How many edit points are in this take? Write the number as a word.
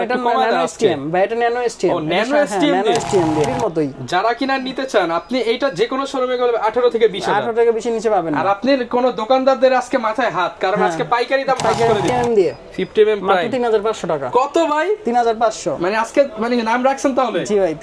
two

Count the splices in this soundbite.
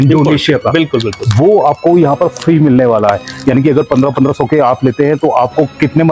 zero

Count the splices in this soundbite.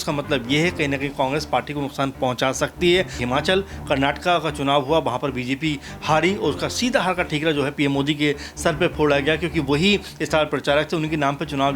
one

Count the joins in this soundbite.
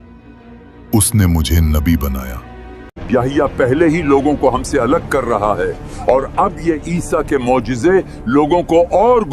one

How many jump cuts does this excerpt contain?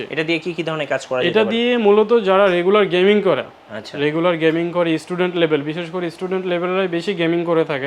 zero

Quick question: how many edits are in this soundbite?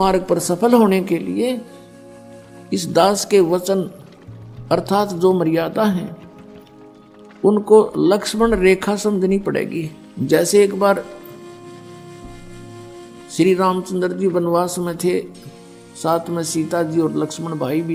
zero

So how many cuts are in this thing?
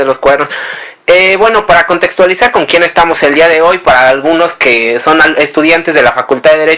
one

